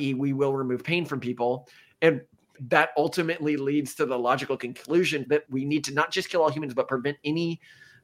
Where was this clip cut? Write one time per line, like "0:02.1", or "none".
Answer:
0:02.5
0:05.4